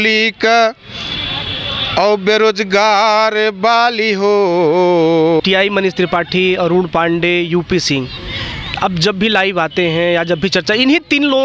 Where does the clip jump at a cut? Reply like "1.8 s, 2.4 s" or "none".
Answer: 5.4 s